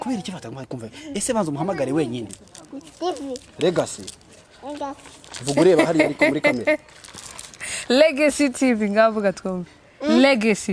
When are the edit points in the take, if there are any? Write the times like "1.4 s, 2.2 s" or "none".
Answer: 2.4 s